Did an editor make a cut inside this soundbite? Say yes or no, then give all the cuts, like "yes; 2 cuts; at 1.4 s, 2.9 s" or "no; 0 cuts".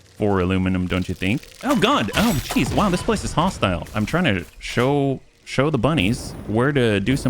yes; 1 cut; at 3.9 s